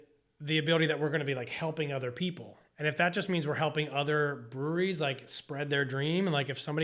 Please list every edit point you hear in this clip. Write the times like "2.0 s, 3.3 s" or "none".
none